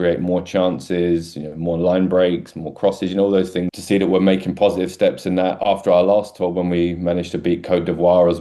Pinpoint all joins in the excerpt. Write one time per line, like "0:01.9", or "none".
0:03.7